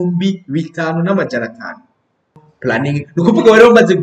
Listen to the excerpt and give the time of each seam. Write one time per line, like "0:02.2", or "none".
0:02.5